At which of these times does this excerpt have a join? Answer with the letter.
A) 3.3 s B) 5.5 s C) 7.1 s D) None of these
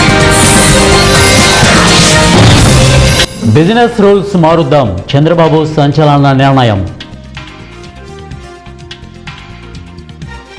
A